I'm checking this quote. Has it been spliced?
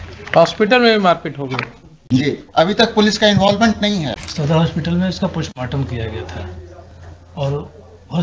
yes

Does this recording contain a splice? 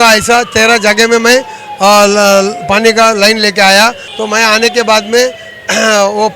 yes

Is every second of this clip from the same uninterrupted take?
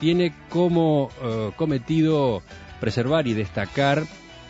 no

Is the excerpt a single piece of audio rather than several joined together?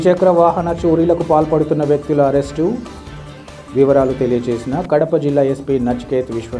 yes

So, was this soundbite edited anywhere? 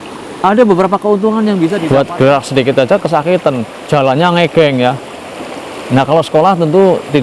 yes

